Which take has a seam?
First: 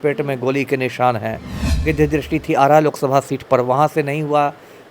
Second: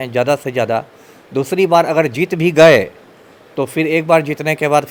first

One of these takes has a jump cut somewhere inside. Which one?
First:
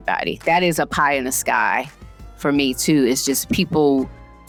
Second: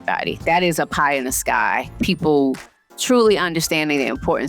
second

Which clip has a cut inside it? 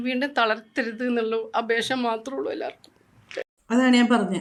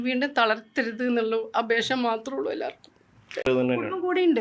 second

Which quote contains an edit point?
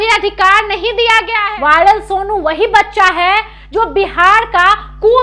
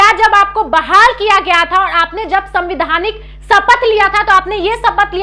first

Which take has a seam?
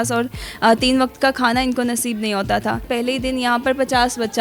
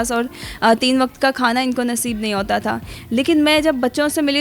first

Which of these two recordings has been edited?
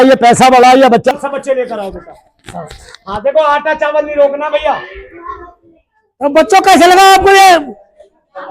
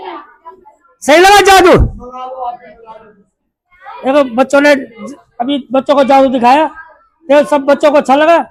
first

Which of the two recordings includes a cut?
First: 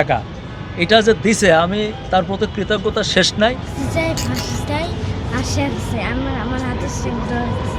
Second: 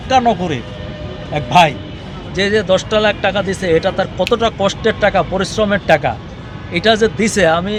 first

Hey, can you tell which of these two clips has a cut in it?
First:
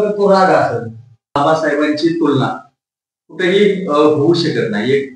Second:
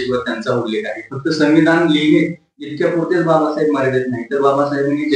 first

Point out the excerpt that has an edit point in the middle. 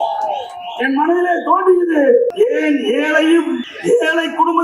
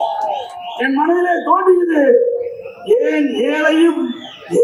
first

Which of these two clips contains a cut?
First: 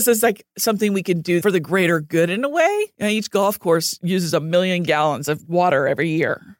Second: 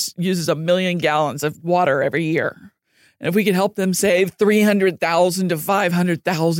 first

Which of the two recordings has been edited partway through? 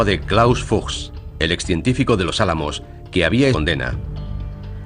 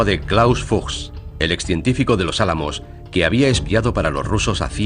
second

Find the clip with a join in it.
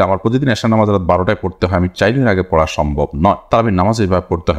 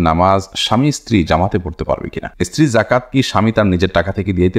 second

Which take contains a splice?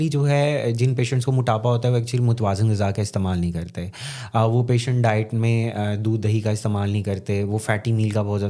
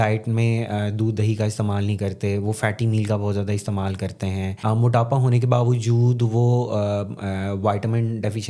second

